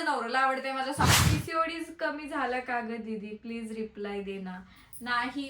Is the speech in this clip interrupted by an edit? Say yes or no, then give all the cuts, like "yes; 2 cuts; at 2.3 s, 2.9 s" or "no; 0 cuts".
yes; 1 cut; at 1.1 s